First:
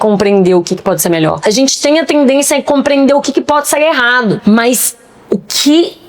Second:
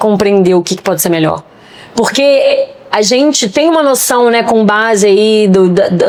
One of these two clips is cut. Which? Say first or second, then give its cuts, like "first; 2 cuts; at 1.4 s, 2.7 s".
first; 2 cuts; at 1.4 s, 4.4 s